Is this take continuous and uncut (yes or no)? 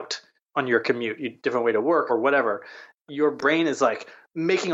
no